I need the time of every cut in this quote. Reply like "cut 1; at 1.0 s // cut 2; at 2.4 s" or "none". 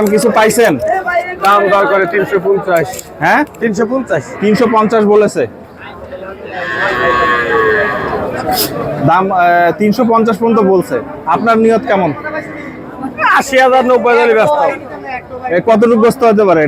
none

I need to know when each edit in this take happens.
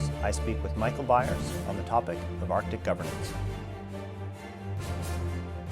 cut 1; at 2.3 s

